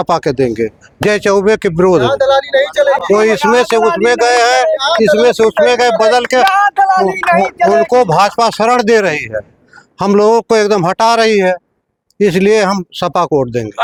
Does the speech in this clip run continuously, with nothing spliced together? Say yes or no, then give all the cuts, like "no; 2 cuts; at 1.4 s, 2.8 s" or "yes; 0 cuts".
yes; 0 cuts